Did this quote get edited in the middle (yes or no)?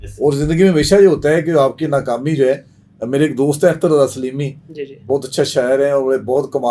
no